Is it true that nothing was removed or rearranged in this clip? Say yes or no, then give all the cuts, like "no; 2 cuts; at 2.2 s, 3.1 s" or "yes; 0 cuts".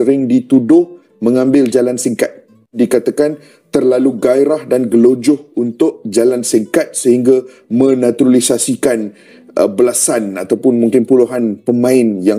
no; 1 cut; at 2.8 s